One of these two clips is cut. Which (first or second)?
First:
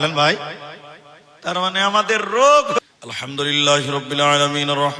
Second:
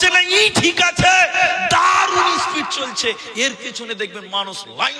first